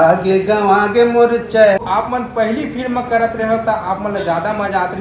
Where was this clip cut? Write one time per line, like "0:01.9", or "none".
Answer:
0:01.8